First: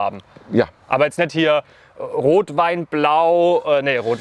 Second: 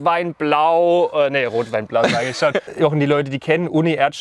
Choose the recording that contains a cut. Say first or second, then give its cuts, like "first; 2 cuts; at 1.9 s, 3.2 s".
second; 1 cut; at 2.7 s